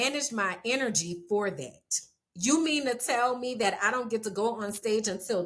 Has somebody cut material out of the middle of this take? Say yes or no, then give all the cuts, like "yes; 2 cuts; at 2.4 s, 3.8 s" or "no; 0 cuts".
no; 0 cuts